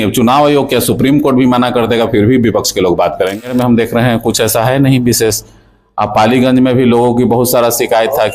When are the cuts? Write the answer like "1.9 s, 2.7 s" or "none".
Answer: 3.3 s